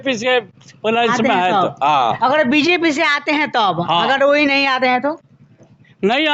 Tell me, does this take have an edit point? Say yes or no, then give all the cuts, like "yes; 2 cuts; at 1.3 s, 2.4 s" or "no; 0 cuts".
no; 0 cuts